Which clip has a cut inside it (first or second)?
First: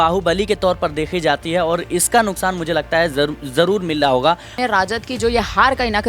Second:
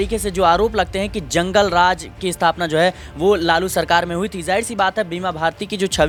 first